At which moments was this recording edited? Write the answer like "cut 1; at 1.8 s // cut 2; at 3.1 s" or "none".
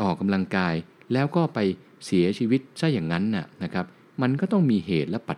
none